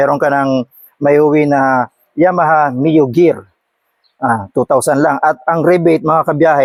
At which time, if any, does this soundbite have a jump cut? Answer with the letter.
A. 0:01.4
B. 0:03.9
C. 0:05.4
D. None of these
D